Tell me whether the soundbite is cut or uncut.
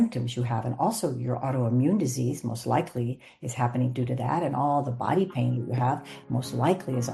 uncut